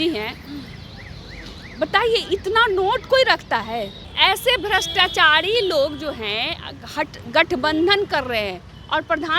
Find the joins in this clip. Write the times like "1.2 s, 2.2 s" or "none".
4.0 s

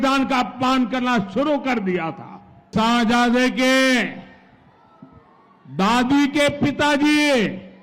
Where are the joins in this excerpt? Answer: 2.7 s

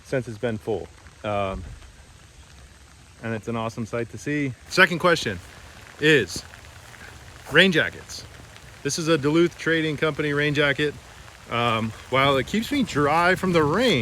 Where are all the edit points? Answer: 4.6 s

